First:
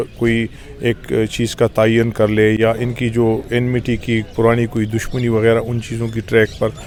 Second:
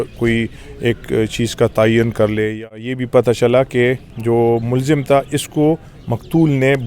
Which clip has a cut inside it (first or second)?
second